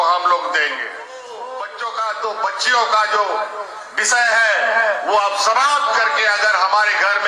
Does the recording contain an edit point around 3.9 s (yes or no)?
no